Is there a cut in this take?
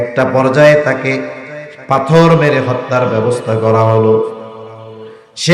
no; 0 cuts

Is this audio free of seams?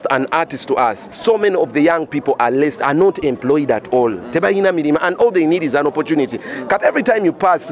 no; 1 cut; at 1.1 s

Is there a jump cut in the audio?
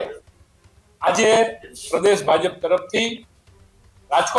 no; 0 cuts

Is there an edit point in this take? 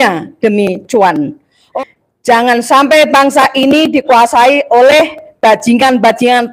yes; 1 cut; at 1.6 s

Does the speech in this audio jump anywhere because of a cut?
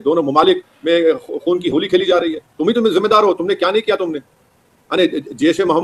no; 0 cuts

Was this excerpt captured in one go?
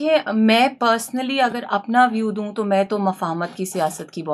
yes; 0 cuts

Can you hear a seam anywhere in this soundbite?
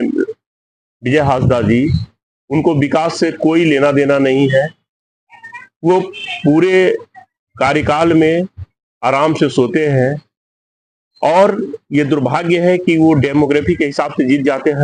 no; 0 cuts

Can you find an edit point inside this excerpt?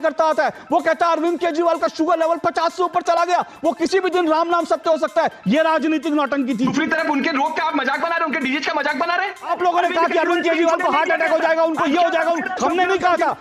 yes; 2 cuts; at 6.7 s, 9.5 s

